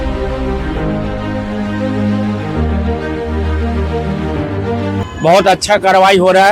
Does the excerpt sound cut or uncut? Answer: cut